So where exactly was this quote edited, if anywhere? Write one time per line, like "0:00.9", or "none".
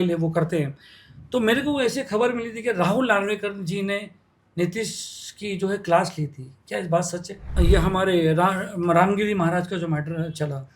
0:07.4